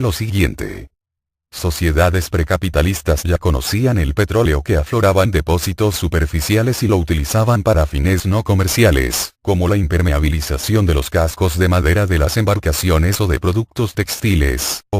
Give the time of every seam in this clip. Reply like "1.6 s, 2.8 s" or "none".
9.9 s